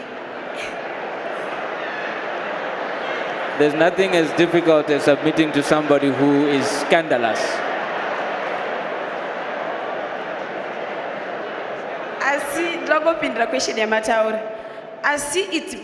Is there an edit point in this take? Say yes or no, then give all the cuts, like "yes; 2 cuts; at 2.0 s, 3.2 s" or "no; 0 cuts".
no; 0 cuts